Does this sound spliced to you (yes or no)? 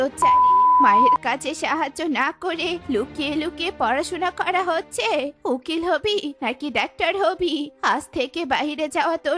no